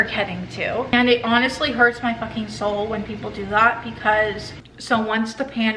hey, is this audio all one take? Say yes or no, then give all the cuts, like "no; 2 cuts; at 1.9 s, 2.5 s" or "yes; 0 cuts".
no; 2 cuts; at 0.9 s, 4.5 s